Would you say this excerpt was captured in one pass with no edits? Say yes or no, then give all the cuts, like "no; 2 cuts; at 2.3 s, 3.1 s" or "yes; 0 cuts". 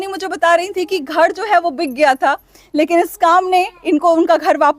yes; 0 cuts